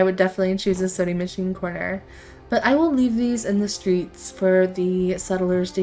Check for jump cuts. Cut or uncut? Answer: uncut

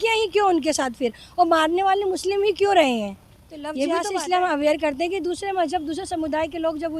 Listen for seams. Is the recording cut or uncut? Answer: cut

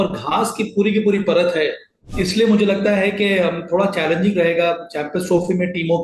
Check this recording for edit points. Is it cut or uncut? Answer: uncut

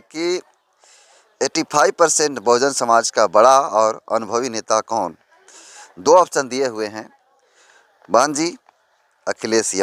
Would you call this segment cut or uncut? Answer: uncut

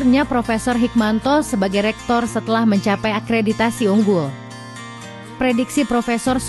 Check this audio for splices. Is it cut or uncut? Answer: uncut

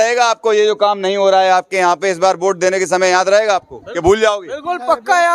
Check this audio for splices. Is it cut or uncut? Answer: uncut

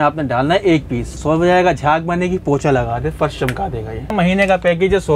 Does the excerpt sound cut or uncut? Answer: cut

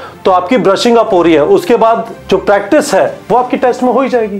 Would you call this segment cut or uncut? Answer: cut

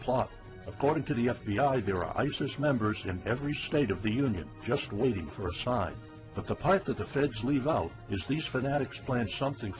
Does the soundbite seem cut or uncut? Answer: cut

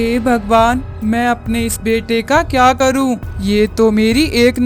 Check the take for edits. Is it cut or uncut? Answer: uncut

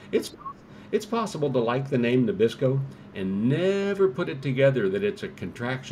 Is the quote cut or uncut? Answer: uncut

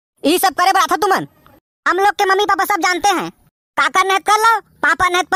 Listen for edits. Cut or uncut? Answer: uncut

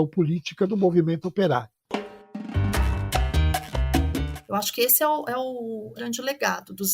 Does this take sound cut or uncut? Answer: cut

